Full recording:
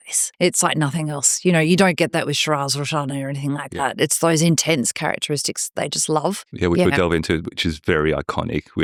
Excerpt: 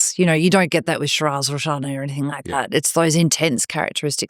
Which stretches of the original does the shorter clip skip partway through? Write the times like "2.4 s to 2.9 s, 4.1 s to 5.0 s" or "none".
none